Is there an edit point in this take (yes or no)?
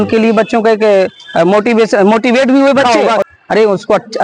yes